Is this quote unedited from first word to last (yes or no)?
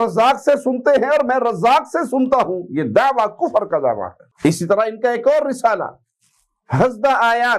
yes